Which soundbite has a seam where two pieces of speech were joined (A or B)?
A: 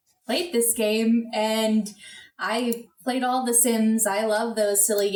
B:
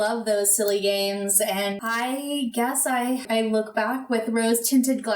B